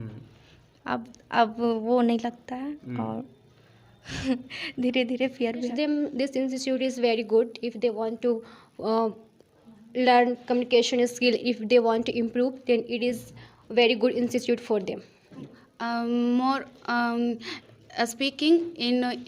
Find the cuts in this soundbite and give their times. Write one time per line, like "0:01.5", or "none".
0:05.7
0:15.4